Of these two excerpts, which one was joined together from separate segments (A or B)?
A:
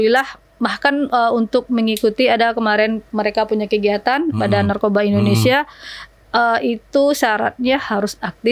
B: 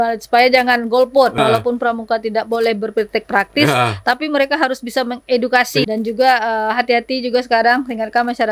B